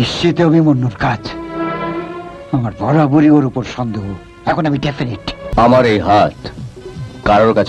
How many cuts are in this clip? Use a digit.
1